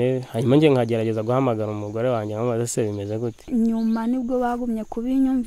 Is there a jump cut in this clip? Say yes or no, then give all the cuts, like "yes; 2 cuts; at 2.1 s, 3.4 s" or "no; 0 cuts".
yes; 1 cut; at 3.5 s